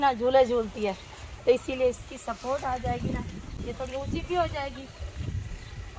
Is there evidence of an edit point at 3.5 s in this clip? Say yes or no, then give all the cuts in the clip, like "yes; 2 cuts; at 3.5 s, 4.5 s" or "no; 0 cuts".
no; 0 cuts